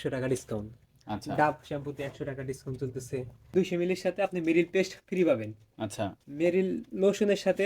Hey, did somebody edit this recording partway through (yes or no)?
yes